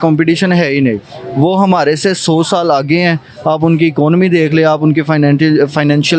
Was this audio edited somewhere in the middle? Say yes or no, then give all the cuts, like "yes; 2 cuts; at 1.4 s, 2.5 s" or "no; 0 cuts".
no; 0 cuts